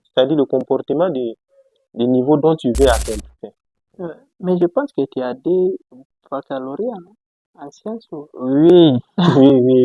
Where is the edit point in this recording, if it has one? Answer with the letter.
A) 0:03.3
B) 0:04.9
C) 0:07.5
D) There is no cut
A